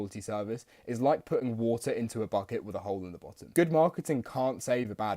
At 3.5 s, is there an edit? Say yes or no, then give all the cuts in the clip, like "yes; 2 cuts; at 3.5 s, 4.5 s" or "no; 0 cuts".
yes; 1 cut; at 3.5 s